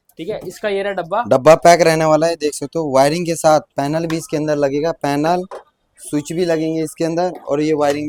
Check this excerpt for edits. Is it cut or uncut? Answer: uncut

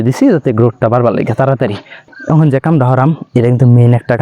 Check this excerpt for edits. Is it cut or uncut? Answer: cut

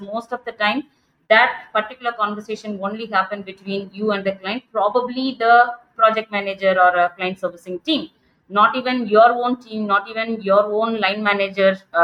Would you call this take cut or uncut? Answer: uncut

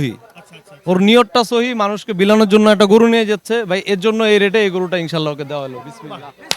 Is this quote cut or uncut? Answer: uncut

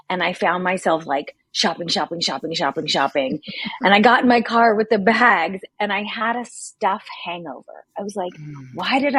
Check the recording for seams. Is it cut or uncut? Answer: uncut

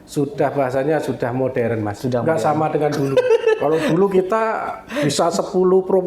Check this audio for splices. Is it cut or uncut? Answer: uncut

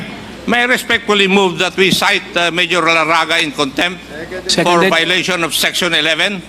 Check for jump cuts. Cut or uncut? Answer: uncut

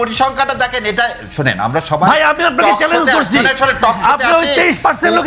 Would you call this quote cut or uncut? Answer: uncut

